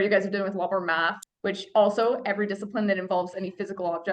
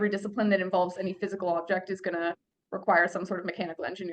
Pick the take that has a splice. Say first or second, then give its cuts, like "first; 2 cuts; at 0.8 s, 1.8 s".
first; 1 cut; at 1.2 s